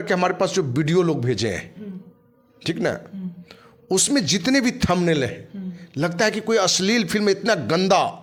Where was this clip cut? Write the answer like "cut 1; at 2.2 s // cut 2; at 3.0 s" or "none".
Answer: none

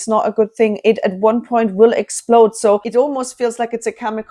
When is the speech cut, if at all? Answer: cut 1; at 2.9 s

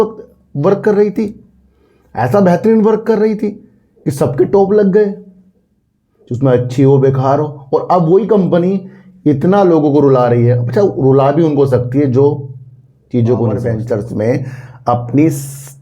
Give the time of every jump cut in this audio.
cut 1; at 13.7 s

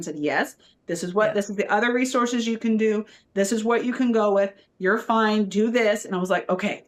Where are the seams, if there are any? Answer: none

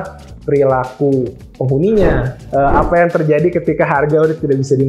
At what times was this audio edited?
cut 1; at 2.3 s

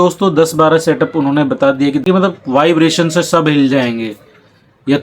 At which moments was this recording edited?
cut 1; at 2.0 s

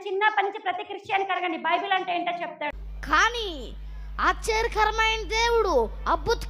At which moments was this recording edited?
none

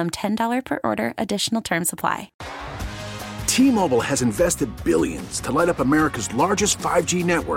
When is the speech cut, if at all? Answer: cut 1; at 2.4 s

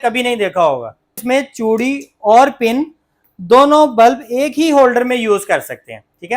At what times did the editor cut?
cut 1; at 1.2 s

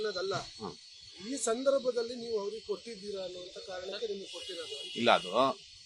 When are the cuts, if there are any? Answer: cut 1; at 3.6 s

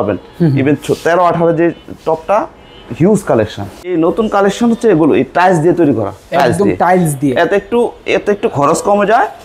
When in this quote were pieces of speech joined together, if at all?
cut 1; at 3.9 s

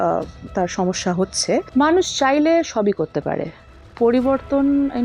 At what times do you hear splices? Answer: cut 1; at 1.7 s

